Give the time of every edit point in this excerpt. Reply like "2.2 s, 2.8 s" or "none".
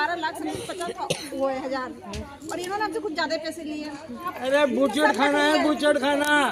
4.3 s

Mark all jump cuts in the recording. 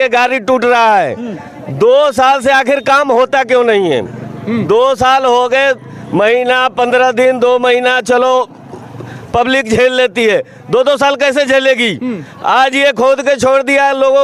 none

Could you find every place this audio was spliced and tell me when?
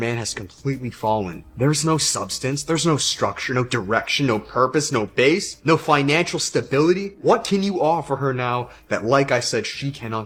none

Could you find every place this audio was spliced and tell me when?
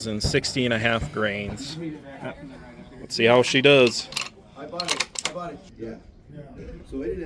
none

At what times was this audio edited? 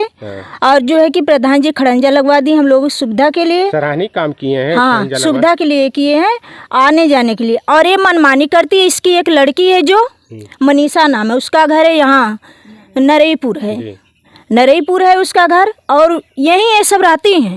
none

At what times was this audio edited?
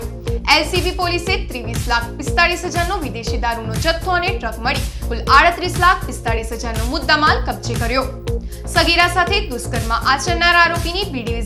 none

